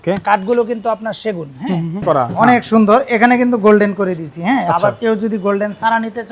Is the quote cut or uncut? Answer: cut